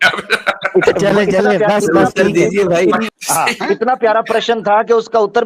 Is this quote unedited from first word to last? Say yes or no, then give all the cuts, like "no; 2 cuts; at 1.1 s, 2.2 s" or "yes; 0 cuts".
no; 1 cut; at 3.1 s